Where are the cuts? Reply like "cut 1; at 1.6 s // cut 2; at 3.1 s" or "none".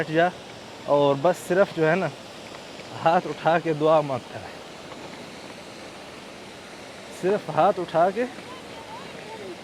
none